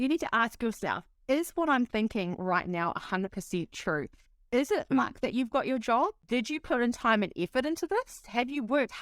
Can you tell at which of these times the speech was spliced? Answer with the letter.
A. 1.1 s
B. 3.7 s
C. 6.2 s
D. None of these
C